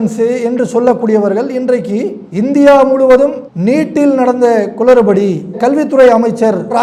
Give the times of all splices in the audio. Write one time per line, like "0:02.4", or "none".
none